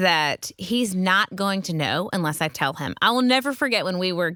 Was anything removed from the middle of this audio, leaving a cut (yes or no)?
no